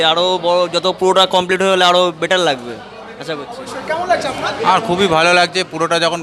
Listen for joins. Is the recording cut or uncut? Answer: uncut